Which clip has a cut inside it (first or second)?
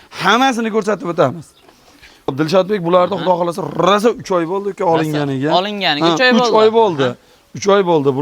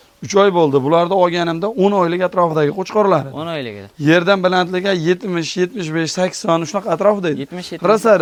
first